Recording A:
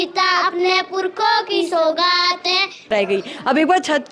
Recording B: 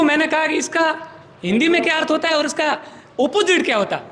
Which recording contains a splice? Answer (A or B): A